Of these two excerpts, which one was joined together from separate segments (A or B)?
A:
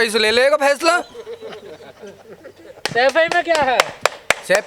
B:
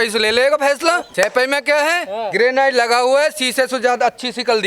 B